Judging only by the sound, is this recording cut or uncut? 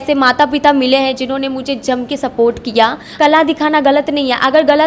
cut